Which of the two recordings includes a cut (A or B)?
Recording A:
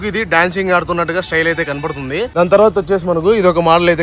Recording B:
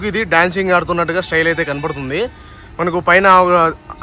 A